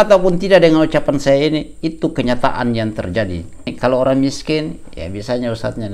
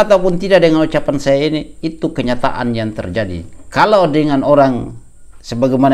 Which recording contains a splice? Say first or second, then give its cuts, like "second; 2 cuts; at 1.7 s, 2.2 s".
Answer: first; 1 cut; at 3.6 s